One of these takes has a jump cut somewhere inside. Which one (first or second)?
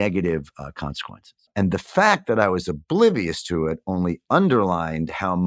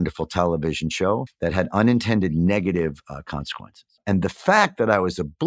second